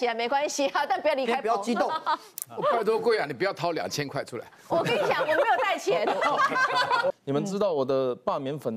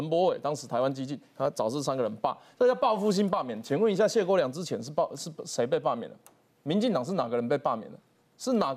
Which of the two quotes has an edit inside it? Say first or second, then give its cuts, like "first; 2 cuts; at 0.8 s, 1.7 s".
first; 1 cut; at 7.1 s